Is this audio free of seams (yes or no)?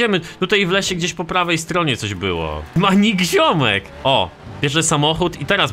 no